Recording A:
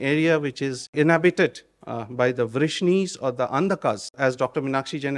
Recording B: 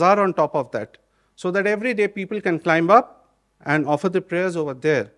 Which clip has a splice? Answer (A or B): A